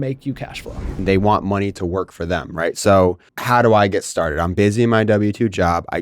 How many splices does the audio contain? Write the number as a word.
two